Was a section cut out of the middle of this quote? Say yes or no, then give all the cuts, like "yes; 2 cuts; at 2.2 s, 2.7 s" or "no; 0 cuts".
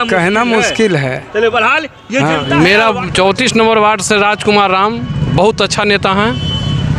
yes; 1 cut; at 2.5 s